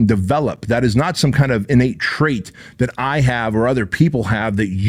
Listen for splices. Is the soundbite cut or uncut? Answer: uncut